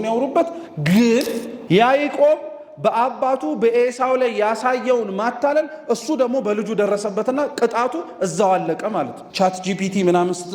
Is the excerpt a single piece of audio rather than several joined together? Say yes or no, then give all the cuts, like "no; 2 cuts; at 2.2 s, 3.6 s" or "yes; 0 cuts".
no; 2 cuts; at 1.5 s, 9.2 s